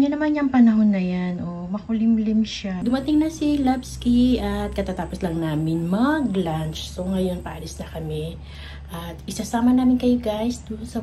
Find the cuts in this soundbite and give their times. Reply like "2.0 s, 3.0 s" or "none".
2.7 s